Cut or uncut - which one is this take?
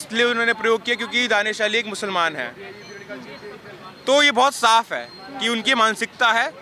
uncut